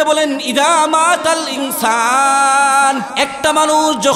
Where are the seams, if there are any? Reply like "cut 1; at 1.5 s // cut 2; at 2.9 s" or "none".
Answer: cut 1; at 3.1 s